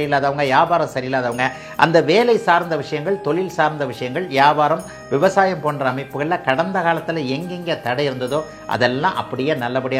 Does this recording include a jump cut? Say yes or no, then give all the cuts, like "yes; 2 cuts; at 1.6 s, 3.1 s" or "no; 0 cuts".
no; 0 cuts